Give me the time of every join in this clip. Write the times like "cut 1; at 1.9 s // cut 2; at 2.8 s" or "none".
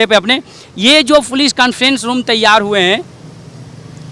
none